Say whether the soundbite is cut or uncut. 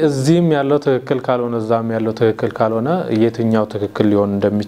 uncut